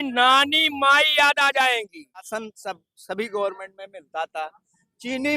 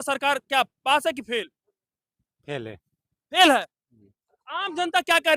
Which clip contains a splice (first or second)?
first